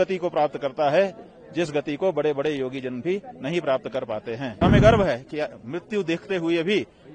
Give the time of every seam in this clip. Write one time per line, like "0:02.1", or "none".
0:04.6